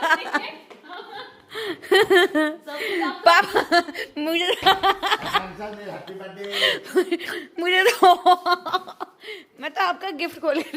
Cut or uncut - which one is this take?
uncut